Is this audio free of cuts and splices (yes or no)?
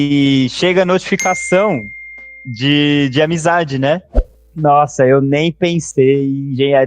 no